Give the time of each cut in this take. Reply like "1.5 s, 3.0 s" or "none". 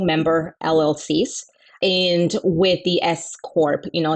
1.8 s